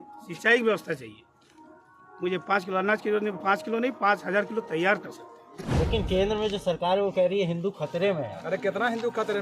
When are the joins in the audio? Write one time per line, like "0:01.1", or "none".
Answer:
0:05.6